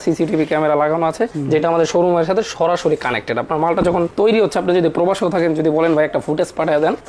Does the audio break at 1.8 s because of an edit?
no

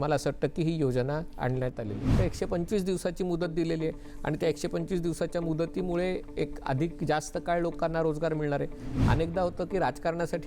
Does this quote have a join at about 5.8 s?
no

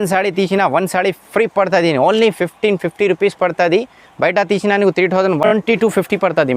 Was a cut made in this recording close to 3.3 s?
no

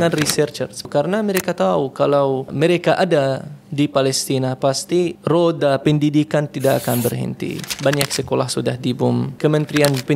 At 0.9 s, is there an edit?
yes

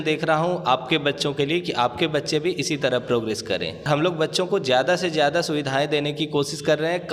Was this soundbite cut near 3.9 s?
yes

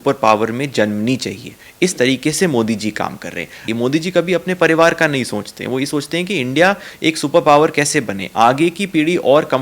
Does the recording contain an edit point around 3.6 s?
yes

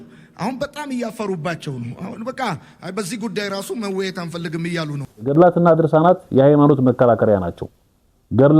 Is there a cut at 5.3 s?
yes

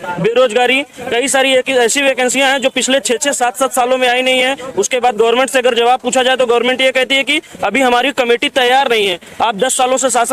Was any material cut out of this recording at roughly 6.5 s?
no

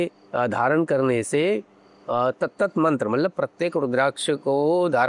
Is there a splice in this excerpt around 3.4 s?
no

